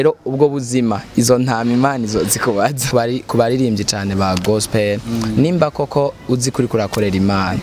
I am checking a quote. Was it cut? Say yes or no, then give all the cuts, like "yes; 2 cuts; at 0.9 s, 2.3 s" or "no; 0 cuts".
yes; 1 cut; at 2.9 s